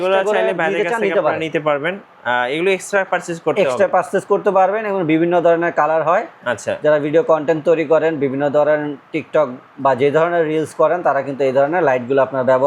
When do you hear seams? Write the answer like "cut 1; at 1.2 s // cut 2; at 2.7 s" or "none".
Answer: none